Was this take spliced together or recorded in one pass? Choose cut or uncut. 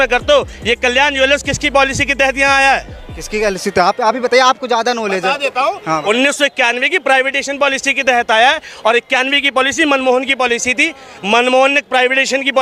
uncut